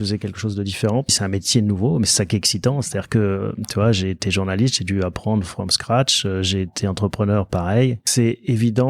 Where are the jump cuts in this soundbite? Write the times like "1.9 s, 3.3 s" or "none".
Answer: 1.2 s, 8.0 s

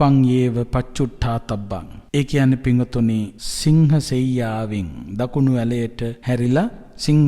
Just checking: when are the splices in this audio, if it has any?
1.9 s, 3.4 s, 6.2 s

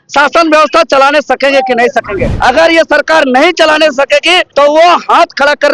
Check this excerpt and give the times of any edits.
2.3 s, 4.5 s

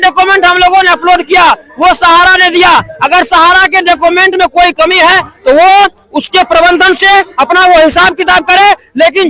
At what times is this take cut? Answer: none

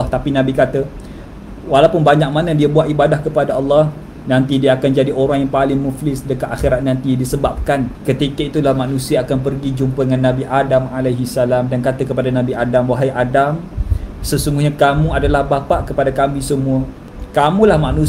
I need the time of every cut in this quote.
7.9 s

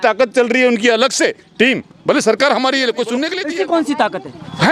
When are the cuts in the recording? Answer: 3.3 s

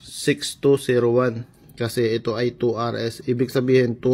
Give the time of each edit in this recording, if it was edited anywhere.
1.6 s

